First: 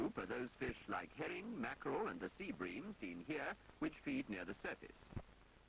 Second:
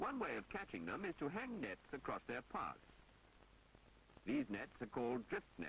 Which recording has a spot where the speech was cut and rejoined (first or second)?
second